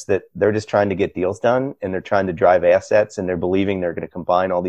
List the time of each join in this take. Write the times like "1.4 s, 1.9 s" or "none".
none